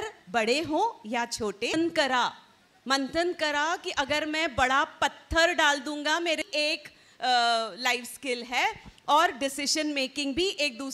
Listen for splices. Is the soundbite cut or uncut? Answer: cut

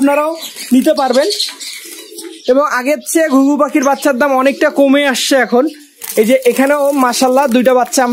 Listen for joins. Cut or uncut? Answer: uncut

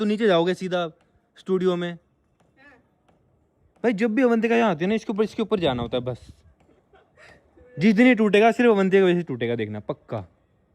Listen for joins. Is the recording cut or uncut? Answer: uncut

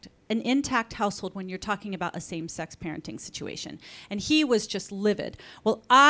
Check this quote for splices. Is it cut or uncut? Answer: uncut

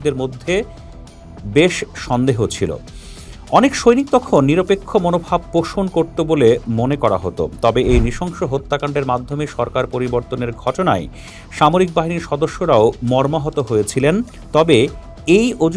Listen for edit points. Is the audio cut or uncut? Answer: uncut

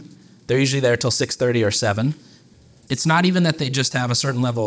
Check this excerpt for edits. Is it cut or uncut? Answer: cut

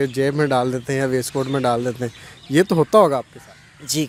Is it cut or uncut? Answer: uncut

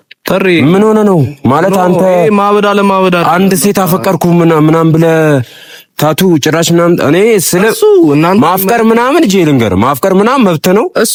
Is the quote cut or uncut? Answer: uncut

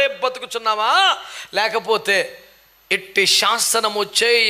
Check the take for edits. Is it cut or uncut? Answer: uncut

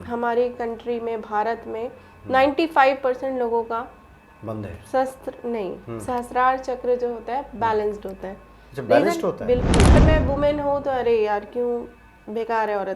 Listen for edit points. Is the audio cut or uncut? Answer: cut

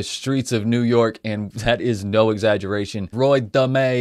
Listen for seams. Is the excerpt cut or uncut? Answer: cut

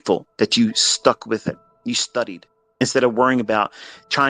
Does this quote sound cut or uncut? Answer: cut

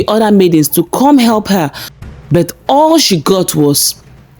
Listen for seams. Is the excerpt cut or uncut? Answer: cut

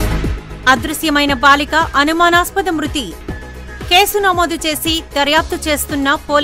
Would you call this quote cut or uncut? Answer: uncut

